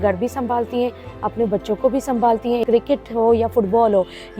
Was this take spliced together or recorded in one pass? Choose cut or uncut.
cut